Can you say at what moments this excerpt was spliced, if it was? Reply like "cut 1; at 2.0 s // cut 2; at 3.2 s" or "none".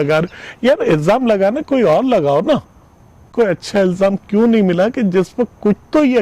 cut 1; at 3.3 s